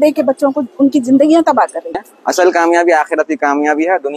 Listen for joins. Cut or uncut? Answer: cut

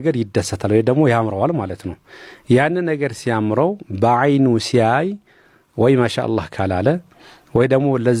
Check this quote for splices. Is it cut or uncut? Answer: uncut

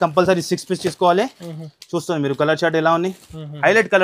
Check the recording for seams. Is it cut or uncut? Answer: uncut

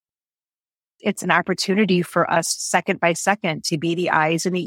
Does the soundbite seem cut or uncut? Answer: uncut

